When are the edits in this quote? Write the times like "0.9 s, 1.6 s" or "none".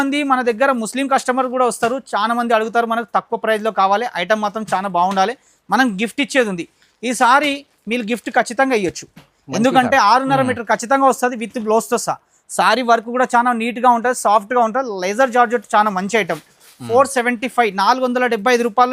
none